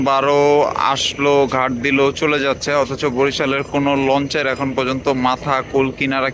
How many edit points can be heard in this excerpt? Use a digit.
0